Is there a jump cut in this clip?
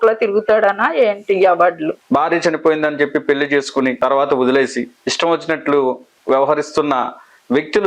yes; 4 cuts; at 2.0 s, 4.0 s, 5.0 s, 6.1 s

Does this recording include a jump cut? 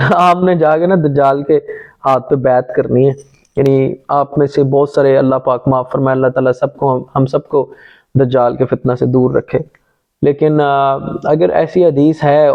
no; 0 cuts

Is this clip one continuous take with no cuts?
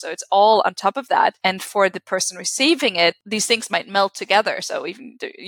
no; 1 cut; at 1.4 s

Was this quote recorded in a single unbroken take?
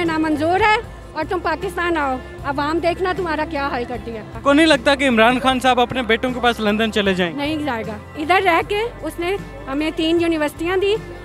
yes; 0 cuts

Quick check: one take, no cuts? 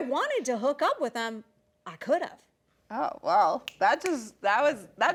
yes; 0 cuts

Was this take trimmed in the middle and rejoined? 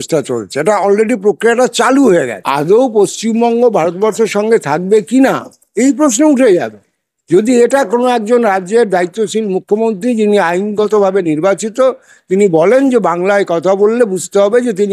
yes; 1 cut; at 2.4 s

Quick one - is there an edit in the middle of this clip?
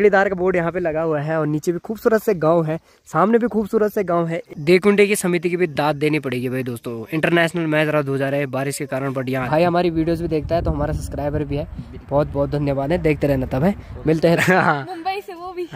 yes; 3 cuts; at 4.4 s, 9.5 s, 14.4 s

